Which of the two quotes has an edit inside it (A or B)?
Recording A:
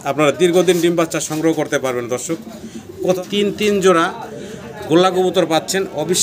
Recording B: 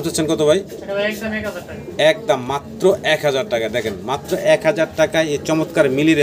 A